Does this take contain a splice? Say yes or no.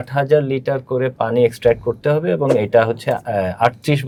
no